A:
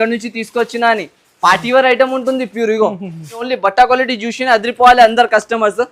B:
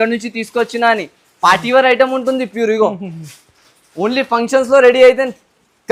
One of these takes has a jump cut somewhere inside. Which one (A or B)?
A